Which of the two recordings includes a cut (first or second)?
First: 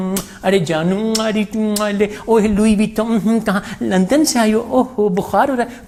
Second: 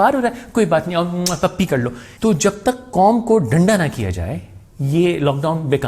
second